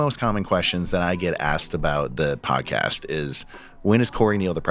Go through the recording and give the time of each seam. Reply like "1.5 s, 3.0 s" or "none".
none